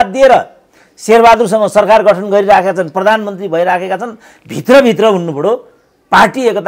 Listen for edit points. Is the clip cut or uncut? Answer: uncut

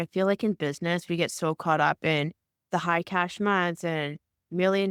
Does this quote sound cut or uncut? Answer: uncut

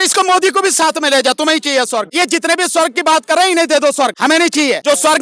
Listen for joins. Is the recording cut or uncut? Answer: cut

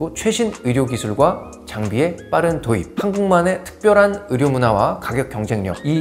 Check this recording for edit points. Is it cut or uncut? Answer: uncut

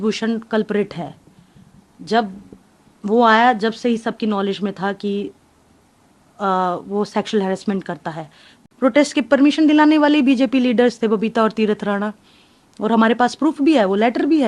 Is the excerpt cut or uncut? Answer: cut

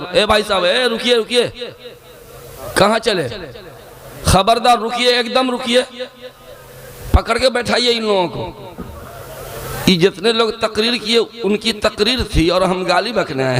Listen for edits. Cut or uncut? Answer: uncut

